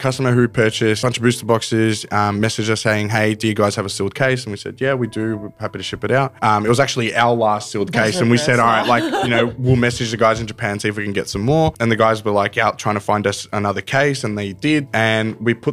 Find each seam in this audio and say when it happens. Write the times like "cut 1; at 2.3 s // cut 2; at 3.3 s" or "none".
cut 1; at 1.0 s // cut 2; at 6.3 s // cut 3; at 11.7 s // cut 4; at 14.8 s